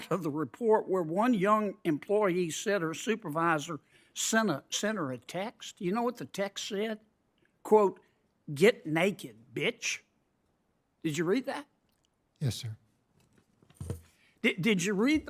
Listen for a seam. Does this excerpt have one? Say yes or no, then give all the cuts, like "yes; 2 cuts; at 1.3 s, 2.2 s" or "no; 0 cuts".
no; 0 cuts